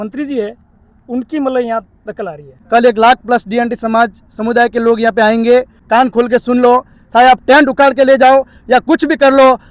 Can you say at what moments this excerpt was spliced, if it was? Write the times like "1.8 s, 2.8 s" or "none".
2.5 s, 5.8 s